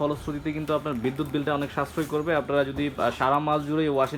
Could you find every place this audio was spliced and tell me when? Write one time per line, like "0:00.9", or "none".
none